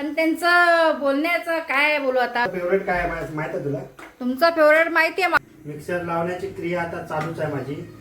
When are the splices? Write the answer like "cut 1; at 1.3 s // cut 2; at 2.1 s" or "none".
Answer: cut 1; at 2.5 s // cut 2; at 5.3 s

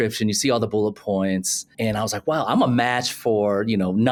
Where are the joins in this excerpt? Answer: none

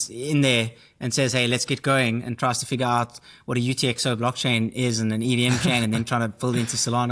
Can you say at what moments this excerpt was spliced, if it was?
none

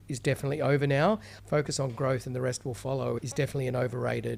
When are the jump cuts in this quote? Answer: cut 1; at 1.3 s // cut 2; at 3.2 s

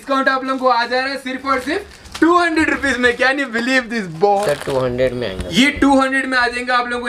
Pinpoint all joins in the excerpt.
cut 1; at 4.3 s

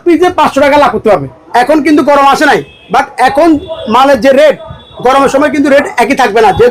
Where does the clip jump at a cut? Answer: cut 1; at 1.4 s

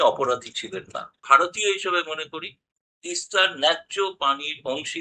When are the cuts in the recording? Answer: cut 1; at 1.2 s

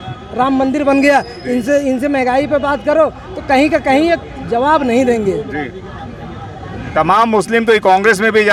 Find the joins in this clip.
none

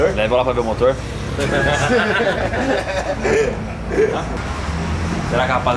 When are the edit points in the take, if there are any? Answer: cut 1; at 4.3 s

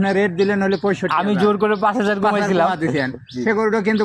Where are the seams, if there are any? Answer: none

